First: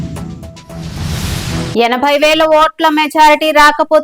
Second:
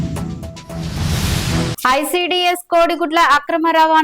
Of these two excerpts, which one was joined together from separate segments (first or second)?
second